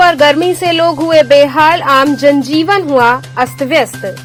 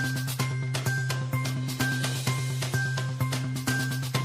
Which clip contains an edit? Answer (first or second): second